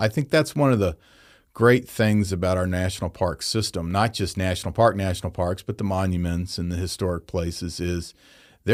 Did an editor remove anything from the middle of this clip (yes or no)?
no